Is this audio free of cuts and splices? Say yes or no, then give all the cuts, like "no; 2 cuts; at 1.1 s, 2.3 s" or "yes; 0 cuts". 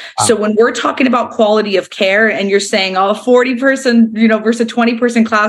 yes; 0 cuts